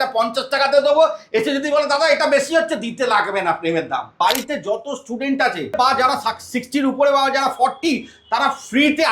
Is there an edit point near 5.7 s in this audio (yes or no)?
yes